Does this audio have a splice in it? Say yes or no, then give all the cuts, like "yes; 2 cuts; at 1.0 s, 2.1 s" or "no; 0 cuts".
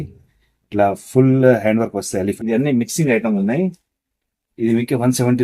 yes; 1 cut; at 2.4 s